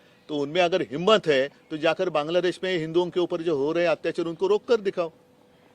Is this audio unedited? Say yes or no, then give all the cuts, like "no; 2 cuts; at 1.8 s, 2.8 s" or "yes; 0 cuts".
yes; 0 cuts